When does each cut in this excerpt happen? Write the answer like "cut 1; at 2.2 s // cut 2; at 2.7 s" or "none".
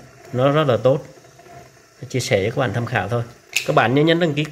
cut 1; at 3.5 s